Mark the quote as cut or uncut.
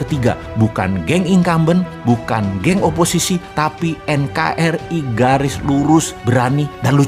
uncut